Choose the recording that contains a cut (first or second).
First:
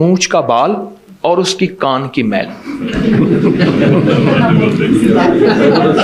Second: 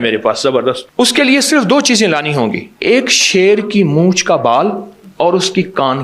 second